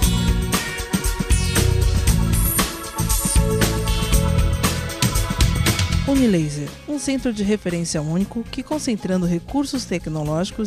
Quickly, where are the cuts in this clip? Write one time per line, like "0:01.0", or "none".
none